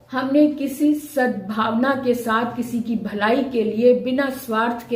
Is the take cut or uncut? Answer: uncut